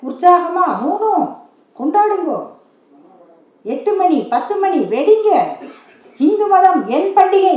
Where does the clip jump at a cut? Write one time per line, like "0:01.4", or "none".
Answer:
none